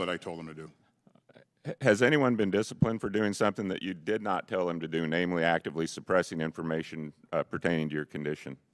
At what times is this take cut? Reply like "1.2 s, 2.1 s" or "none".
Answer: none

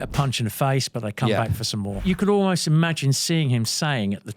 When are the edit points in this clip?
2.0 s

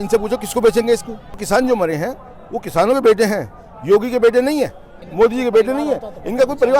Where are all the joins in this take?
1.4 s, 5.0 s

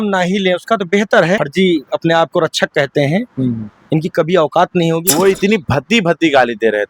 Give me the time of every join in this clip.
1.4 s, 5.1 s

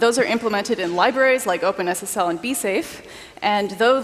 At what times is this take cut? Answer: none

